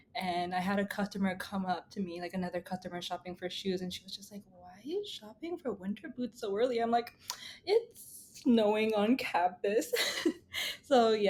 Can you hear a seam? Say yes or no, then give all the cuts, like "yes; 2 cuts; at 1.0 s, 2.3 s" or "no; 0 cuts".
no; 0 cuts